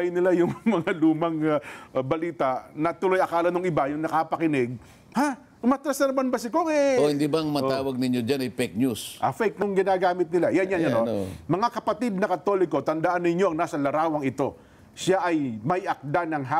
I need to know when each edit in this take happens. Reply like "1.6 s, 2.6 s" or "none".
9.6 s